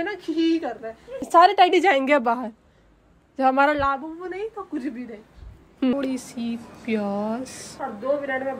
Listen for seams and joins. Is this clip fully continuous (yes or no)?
no